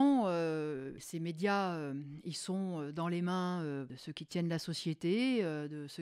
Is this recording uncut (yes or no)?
no